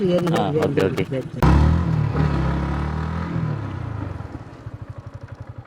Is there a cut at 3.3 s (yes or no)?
no